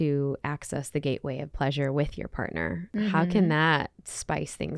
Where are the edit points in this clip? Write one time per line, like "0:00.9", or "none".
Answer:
0:02.8